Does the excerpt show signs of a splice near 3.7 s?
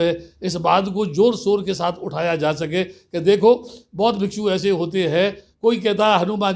no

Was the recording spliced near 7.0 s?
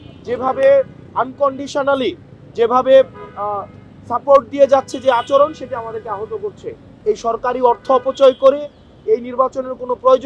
yes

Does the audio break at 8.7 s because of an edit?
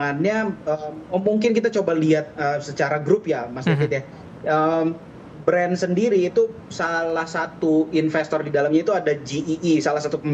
no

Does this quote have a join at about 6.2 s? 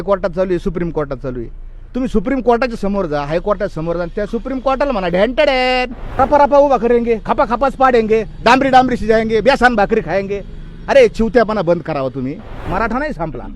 yes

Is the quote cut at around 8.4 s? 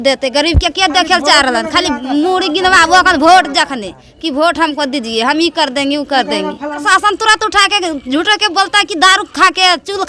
no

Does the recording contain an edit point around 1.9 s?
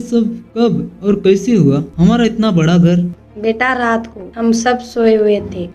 no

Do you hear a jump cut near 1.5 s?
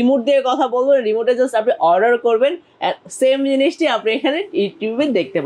no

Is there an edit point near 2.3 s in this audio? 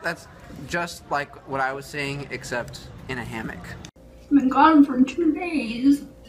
no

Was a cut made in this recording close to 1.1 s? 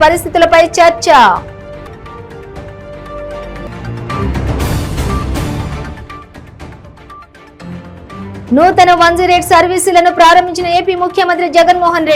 no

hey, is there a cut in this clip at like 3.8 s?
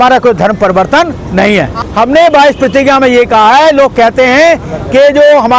no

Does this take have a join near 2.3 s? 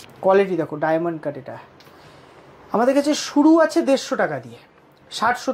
no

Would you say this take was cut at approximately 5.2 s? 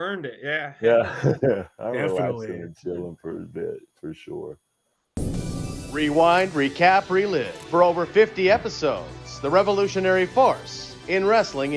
yes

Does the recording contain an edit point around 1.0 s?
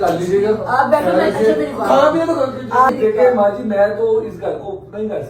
no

